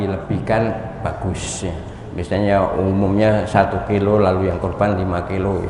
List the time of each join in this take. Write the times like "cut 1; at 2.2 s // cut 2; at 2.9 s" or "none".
none